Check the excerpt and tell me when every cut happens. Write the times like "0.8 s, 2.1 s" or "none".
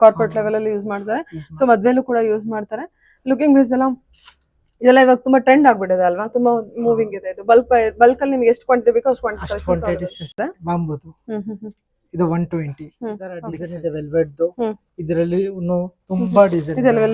10.4 s, 13.6 s